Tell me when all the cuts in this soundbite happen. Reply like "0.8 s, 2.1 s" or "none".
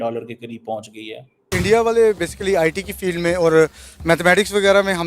1.5 s